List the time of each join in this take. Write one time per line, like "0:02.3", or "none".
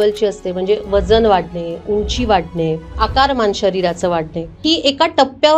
0:02.9
0:04.6